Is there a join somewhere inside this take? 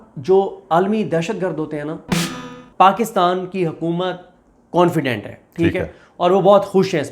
yes; 1 cut; at 2.4 s

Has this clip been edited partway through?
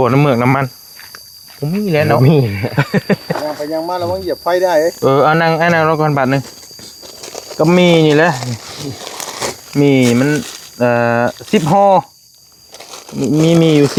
no; 0 cuts

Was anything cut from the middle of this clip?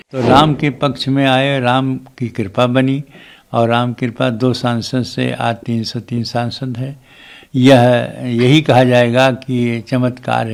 no; 0 cuts

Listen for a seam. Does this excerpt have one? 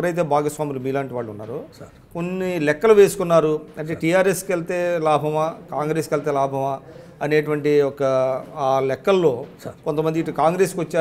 no; 0 cuts

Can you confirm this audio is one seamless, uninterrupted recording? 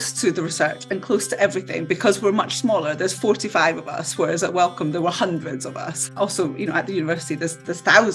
no; 1 cut; at 6.0 s

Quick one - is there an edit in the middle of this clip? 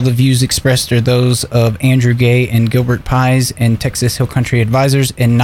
no; 0 cuts

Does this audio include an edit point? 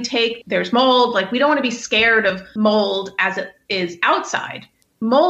yes; 1 cut; at 2.5 s

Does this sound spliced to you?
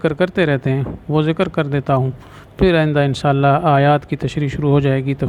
no; 0 cuts

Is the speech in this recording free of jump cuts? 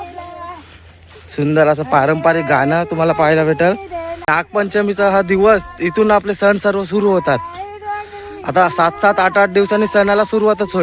no; 1 cut; at 4.3 s

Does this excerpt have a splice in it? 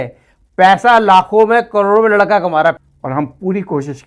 yes; 1 cut; at 2.8 s

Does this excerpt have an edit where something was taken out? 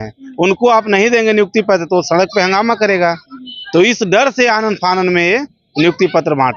no; 0 cuts

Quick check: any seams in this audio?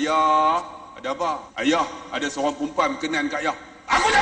yes; 1 cut; at 1.5 s

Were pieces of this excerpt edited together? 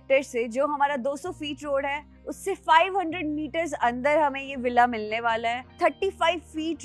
yes; 1 cut; at 5.8 s

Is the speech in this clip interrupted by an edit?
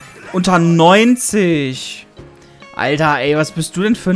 no; 0 cuts

